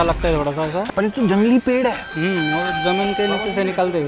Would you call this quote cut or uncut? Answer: uncut